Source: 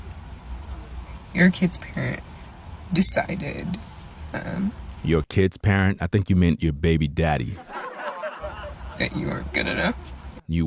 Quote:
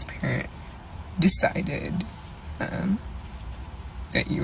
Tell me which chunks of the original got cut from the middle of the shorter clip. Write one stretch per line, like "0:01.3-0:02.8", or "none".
0:05.0-0:08.1